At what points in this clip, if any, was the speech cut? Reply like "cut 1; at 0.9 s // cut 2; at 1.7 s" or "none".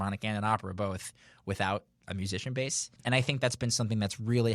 cut 1; at 2.0 s // cut 2; at 2.9 s